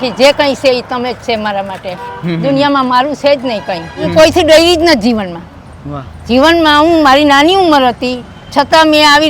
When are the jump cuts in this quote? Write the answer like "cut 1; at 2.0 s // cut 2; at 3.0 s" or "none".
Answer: cut 1; at 4.1 s